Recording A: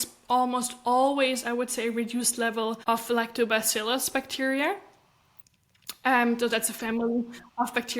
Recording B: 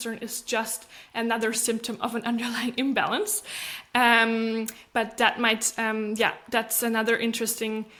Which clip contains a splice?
A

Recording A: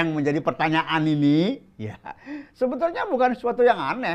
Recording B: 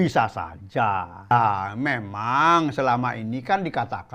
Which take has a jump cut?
B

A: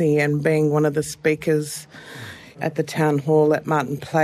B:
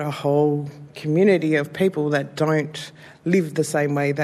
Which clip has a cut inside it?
A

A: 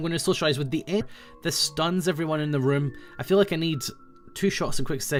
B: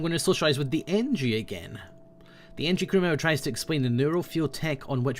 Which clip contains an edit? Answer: B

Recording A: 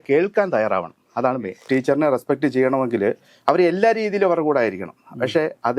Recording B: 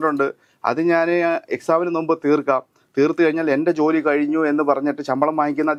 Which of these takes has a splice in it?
A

